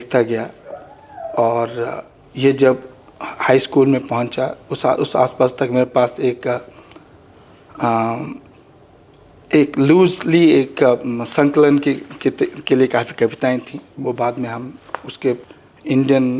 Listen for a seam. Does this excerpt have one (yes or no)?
yes